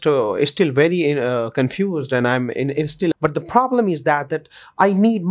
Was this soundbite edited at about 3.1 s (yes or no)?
yes